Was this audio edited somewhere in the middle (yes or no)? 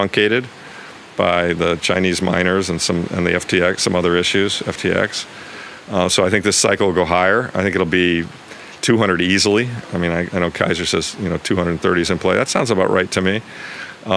no